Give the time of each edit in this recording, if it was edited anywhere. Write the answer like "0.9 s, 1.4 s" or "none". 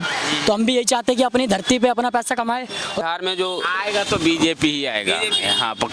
3.0 s